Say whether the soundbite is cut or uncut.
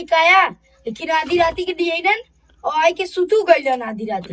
uncut